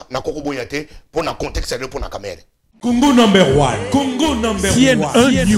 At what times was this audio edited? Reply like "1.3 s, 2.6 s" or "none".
2.9 s